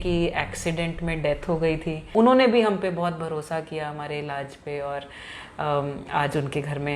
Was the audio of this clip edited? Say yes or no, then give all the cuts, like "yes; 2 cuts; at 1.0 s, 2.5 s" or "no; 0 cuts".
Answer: yes; 1 cut; at 2.0 s